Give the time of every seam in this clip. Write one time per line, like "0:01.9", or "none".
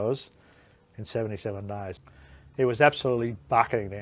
0:02.0